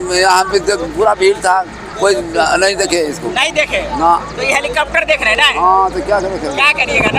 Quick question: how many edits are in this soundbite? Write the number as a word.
zero